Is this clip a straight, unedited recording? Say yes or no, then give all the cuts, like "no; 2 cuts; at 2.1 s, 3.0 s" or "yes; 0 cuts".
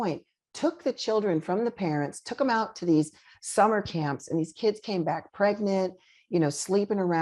yes; 0 cuts